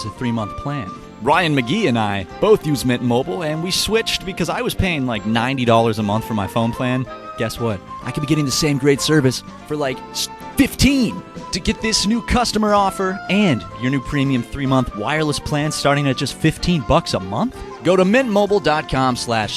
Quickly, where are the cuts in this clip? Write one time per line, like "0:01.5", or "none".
0:01.1